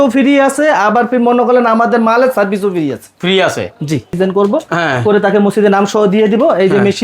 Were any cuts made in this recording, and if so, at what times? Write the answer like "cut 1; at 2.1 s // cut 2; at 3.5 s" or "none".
cut 1; at 4.1 s